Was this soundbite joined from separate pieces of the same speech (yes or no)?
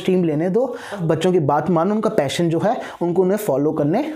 yes